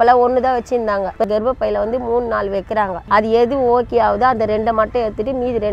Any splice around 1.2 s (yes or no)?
yes